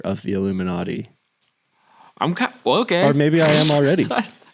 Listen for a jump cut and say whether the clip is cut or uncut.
uncut